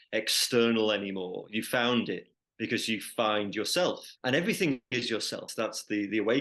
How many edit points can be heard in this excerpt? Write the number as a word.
two